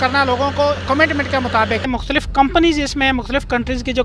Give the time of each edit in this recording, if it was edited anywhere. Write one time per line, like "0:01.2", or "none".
0:01.9